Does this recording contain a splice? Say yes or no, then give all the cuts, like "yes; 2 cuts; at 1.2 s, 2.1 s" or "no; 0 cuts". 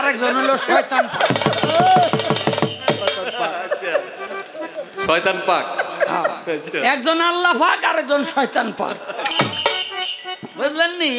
no; 0 cuts